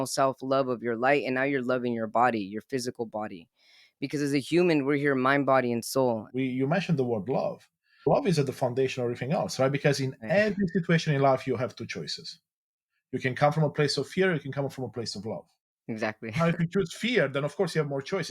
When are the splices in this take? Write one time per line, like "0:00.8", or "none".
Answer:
0:06.3
0:08.1